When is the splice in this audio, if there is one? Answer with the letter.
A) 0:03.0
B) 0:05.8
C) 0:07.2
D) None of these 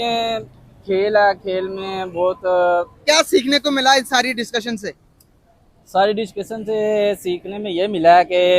A